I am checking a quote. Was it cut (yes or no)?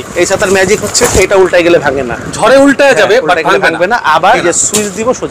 yes